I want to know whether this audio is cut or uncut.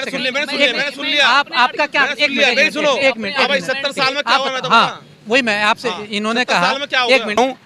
uncut